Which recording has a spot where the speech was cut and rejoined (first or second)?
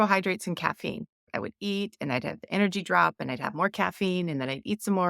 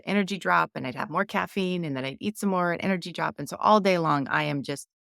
first